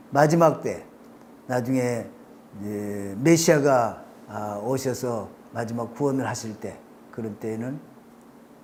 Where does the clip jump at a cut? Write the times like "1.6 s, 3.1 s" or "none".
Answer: none